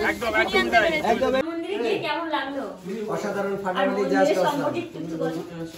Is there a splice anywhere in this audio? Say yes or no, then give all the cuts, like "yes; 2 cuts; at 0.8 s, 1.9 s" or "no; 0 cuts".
yes; 1 cut; at 1.4 s